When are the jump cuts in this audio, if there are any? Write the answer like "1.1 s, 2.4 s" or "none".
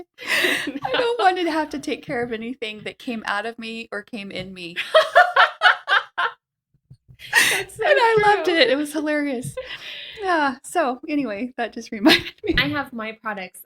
12.6 s